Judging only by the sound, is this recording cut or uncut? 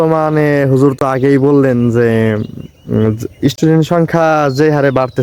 uncut